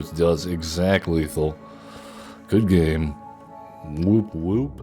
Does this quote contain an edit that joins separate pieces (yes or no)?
no